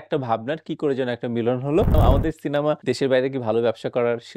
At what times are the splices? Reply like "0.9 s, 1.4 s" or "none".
2.0 s